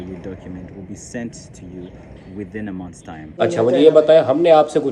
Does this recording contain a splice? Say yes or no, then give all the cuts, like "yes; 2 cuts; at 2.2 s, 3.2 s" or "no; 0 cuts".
yes; 1 cut; at 3.4 s